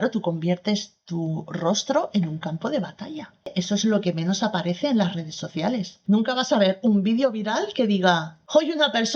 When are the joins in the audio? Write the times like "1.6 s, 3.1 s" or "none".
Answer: 3.5 s